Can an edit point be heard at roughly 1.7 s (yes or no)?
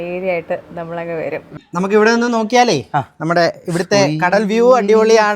yes